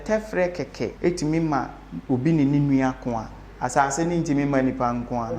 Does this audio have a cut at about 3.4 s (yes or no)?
no